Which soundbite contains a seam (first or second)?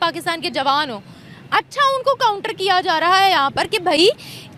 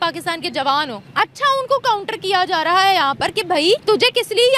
second